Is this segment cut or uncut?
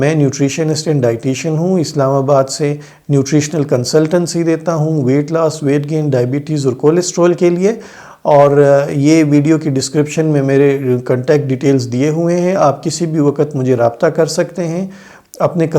uncut